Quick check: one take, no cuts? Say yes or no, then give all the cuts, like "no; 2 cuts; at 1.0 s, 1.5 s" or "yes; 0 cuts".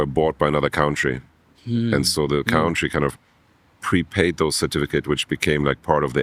yes; 0 cuts